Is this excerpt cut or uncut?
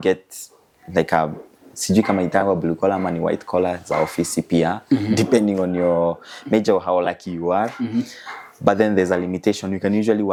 uncut